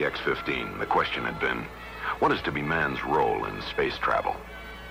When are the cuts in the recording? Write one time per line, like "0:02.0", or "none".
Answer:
0:03.0